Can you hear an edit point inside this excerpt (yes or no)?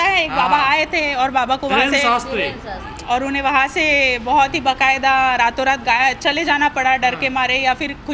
no